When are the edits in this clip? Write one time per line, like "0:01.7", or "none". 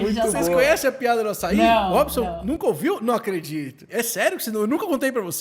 0:04.2

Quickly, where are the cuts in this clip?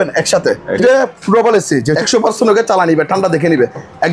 0:00.8
0:02.0

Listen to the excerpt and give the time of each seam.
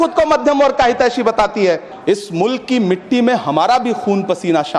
0:01.9

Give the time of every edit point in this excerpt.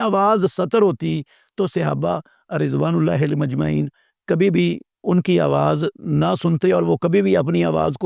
none

